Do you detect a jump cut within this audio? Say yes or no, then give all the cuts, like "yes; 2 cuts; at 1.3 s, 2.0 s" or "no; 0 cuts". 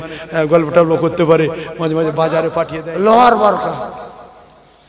yes; 1 cut; at 2.7 s